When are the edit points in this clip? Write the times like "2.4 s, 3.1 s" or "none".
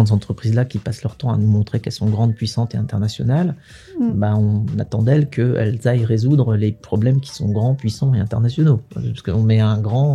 none